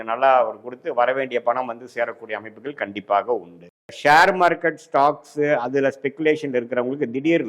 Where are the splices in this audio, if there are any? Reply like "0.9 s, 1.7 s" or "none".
4.0 s